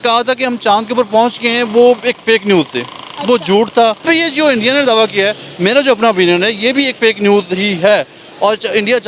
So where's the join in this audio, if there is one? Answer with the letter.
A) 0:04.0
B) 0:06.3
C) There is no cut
A